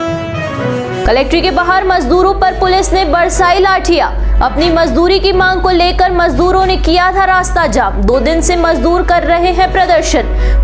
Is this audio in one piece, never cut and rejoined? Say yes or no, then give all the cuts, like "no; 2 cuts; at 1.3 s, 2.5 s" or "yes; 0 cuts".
yes; 0 cuts